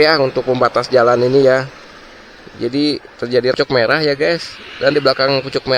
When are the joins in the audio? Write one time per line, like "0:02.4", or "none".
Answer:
0:03.5